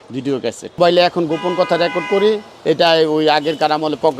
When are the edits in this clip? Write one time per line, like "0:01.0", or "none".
0:00.8
0:02.5